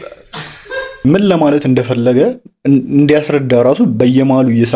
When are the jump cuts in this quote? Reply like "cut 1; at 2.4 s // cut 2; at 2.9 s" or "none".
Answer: cut 1; at 1.0 s